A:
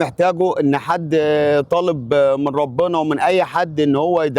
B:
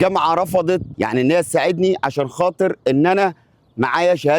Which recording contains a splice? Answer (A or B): B